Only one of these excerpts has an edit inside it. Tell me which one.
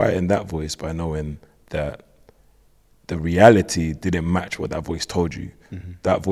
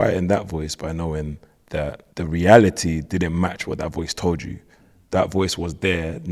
second; 1 cut; at 2.0 s

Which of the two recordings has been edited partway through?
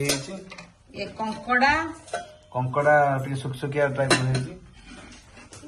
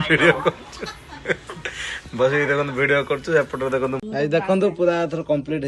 second; 1 cut; at 4.0 s

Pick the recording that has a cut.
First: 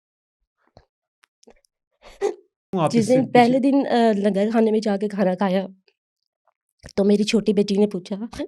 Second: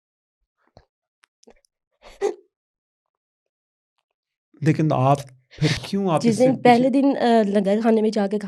first; 1 cut; at 2.7 s

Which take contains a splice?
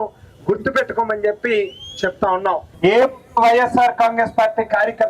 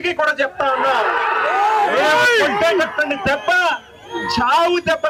first; 1 cut; at 2.7 s

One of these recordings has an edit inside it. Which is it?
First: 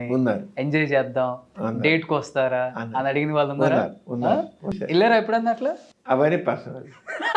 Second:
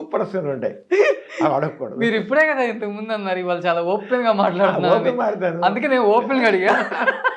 first; 2 cuts; at 4.8 s, 5.9 s

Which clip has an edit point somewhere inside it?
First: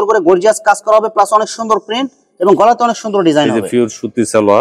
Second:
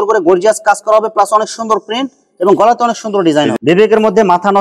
second; 1 cut; at 3.6 s

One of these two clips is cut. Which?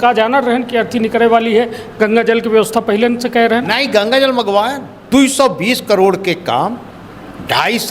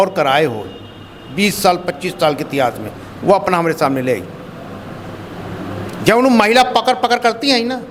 first; 1 cut; at 4.9 s

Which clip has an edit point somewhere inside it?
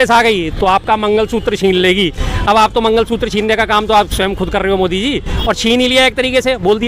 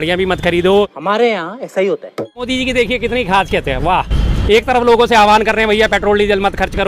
second; 2 cuts; at 1.0 s, 2.5 s

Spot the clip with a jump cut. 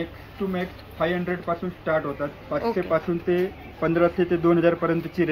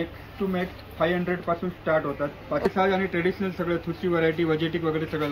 second; 1 cut; at 2.7 s

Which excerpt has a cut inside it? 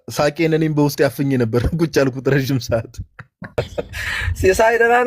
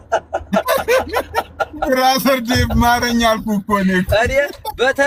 first; 1 cut; at 3.5 s

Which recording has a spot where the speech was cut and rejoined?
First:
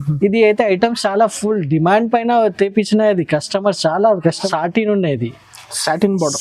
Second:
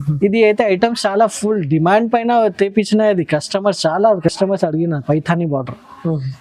first; 1 cut; at 4.4 s

